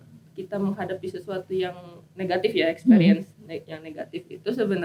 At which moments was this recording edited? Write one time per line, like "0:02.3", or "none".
none